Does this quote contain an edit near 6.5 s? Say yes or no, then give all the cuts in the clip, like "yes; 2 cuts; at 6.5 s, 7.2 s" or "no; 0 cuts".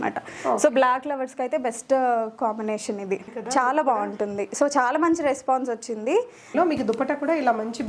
yes; 2 cuts; at 3.4 s, 6.5 s